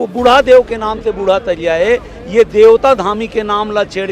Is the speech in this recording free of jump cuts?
yes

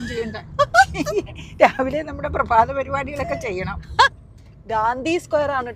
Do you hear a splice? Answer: yes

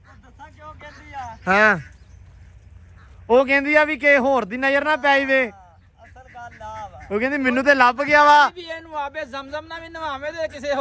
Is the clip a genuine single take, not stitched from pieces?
yes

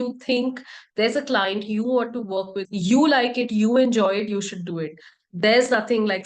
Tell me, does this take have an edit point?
yes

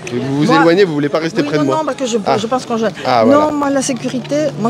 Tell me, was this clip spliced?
no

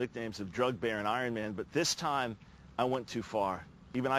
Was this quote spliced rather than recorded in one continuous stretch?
yes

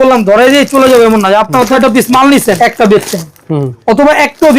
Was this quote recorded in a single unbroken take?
no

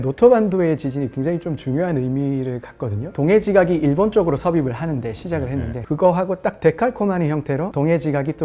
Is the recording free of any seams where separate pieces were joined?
no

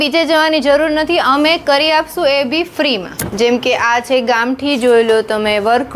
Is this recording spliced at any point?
yes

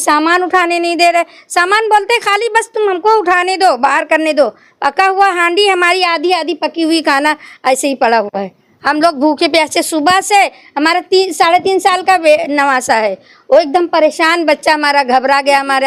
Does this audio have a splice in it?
no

